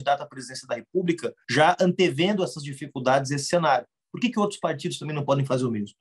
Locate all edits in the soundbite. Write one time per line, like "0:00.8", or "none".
0:01.4